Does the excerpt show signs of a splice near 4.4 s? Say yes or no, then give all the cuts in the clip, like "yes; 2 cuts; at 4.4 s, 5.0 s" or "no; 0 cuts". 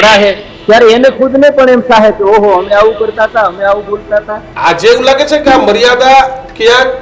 yes; 1 cut; at 4.4 s